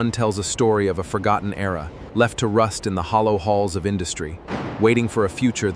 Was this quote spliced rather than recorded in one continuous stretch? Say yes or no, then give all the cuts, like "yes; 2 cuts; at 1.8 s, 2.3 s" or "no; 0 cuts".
no; 0 cuts